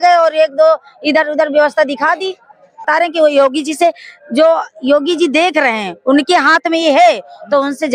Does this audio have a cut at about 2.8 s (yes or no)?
yes